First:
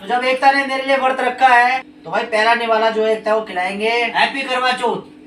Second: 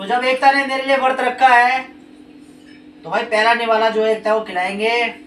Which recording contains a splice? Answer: first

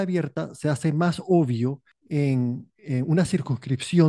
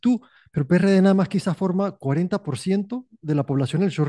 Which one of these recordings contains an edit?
first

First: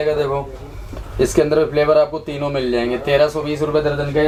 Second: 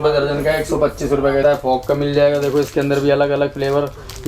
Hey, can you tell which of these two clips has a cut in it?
second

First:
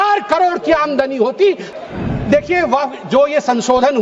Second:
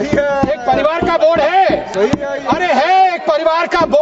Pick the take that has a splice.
first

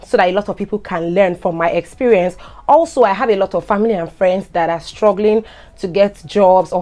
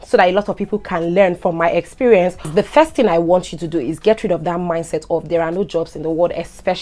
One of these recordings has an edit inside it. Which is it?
second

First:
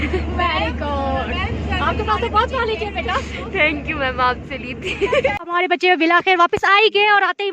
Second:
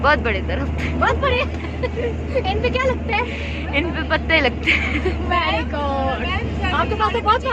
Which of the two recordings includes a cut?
first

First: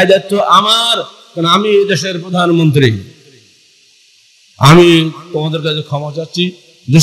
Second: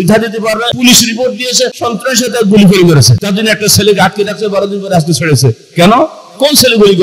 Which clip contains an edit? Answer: second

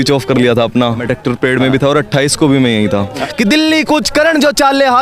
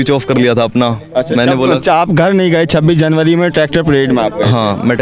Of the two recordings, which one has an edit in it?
first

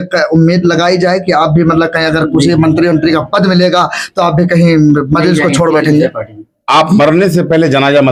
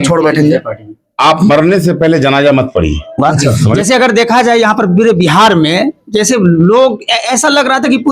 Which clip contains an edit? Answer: second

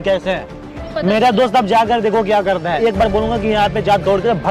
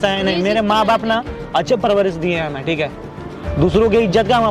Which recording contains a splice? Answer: first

